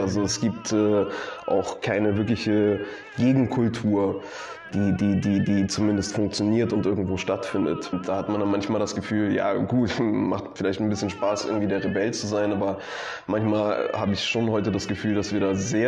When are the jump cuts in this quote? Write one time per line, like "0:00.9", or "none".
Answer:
0:07.9